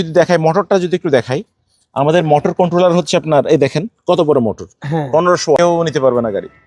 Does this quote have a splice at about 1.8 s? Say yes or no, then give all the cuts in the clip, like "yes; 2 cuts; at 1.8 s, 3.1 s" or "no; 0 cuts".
no; 1 cut; at 5.6 s